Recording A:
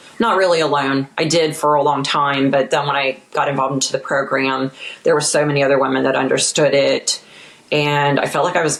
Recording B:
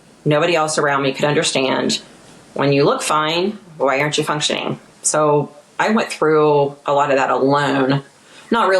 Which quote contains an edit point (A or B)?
B